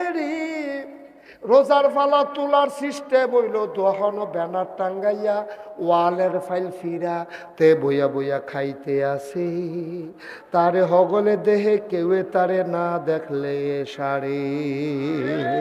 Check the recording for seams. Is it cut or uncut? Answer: uncut